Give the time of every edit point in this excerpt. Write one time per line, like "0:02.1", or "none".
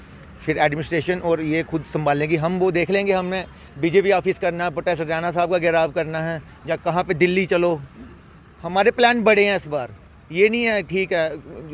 none